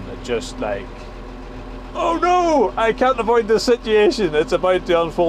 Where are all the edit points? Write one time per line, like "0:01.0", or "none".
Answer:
none